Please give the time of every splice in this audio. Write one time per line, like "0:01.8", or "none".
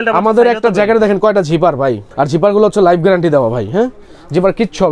0:02.0